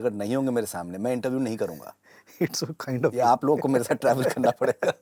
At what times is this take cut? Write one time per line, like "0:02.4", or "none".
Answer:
none